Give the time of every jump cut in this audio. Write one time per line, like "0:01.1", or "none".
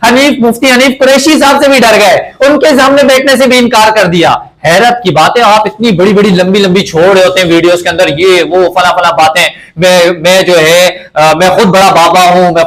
none